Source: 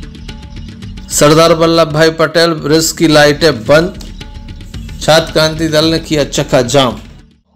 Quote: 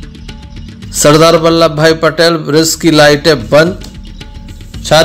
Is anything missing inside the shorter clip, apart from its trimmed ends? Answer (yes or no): yes